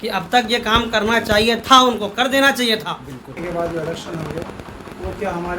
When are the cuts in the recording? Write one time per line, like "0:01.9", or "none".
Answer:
0:03.4

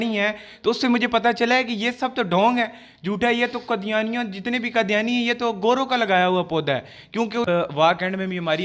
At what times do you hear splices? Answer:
0:07.5

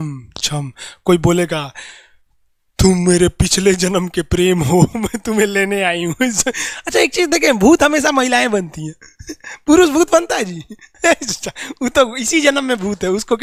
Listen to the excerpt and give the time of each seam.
none

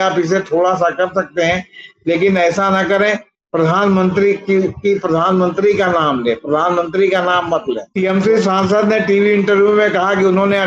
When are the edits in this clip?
0:07.9

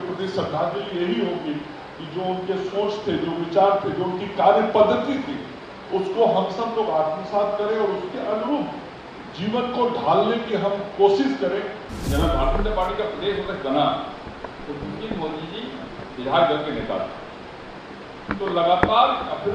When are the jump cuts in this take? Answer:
0:11.8

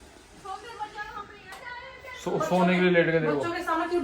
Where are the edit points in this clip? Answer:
0:01.5

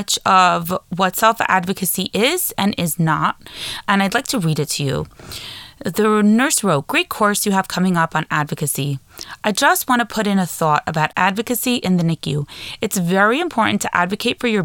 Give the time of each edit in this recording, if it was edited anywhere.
0:11.1

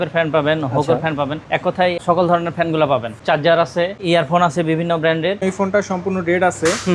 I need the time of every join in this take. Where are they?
0:02.0
0:03.2
0:04.0
0:05.4

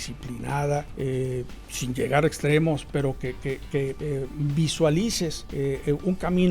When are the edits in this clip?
0:00.9
0:04.0
0:05.4

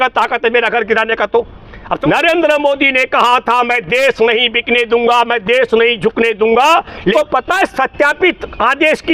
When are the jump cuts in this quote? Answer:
0:02.0
0:07.1

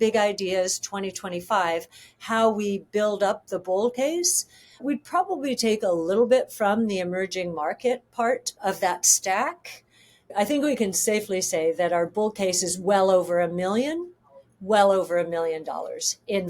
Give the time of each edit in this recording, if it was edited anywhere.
0:08.5
0:10.3

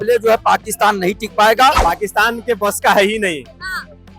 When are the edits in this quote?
0:01.8

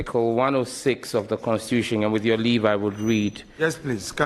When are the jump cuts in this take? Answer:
none

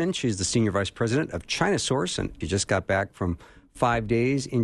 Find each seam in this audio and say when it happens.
0:02.4

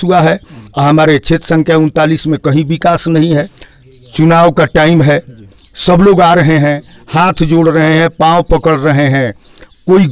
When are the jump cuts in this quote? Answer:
0:03.5

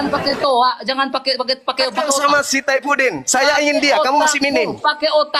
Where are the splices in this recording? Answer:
none

